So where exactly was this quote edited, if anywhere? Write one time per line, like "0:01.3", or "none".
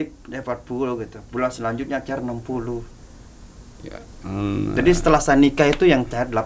none